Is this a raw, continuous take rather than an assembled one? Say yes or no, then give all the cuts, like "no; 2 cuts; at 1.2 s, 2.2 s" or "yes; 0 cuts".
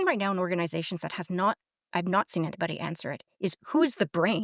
yes; 0 cuts